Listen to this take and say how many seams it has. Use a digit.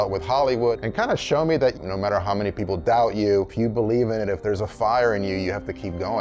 1